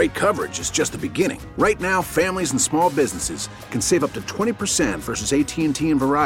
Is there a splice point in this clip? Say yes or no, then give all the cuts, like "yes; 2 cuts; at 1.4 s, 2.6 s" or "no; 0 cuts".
no; 0 cuts